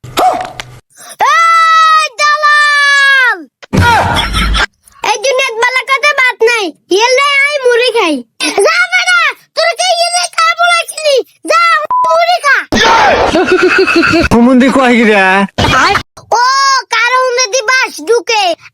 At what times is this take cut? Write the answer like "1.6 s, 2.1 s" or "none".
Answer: 16.1 s